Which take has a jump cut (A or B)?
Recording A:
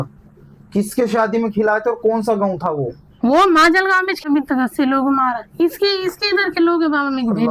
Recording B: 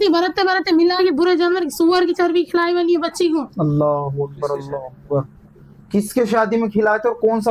A